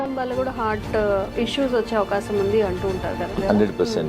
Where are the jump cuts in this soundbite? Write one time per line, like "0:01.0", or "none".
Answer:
0:01.3
0:03.3